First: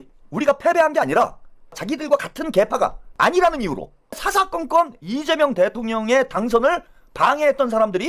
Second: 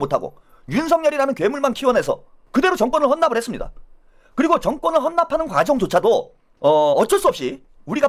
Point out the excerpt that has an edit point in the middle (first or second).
first